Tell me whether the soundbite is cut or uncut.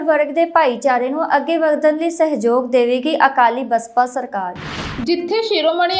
uncut